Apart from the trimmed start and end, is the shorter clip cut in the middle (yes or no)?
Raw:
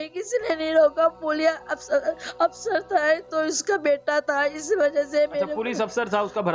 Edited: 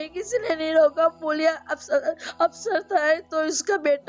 no